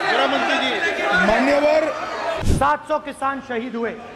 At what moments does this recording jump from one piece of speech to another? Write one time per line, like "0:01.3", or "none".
0:02.4